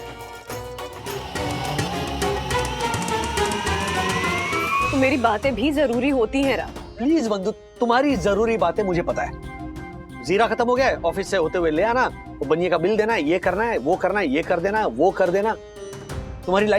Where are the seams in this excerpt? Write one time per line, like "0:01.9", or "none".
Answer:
0:01.2
0:04.9